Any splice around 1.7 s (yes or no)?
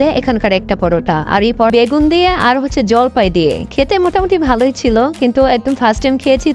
yes